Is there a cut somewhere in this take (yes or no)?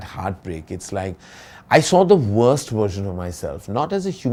no